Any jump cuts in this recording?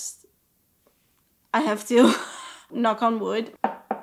yes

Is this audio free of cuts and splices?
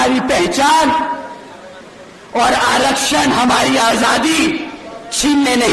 yes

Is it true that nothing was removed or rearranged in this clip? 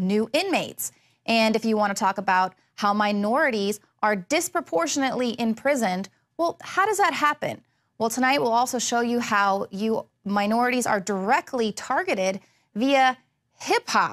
no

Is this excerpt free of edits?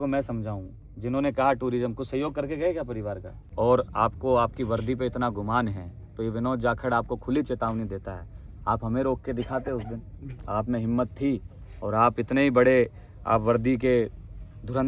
no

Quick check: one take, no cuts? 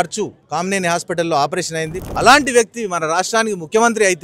no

